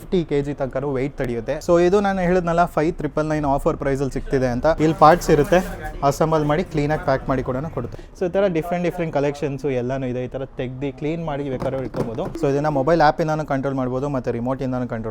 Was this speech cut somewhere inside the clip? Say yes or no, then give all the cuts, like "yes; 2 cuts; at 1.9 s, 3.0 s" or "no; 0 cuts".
yes; 4 cuts; at 1.6 s, 4.8 s, 8.0 s, 12.3 s